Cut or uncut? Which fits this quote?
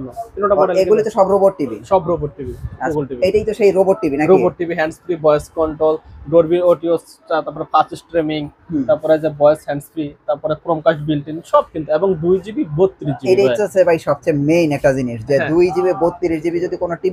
cut